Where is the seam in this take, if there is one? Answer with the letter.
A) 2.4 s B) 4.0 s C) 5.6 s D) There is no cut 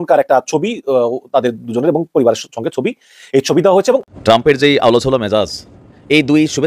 B